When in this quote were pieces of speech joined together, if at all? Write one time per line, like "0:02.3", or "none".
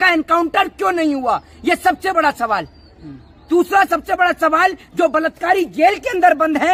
none